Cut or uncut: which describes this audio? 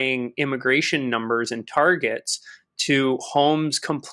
uncut